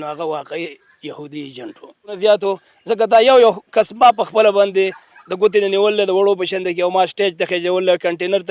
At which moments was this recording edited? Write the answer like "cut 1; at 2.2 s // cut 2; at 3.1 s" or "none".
cut 1; at 2.1 s